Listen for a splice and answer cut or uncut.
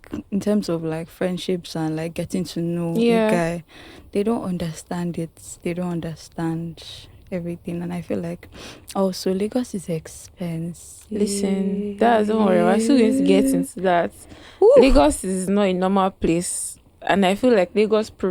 uncut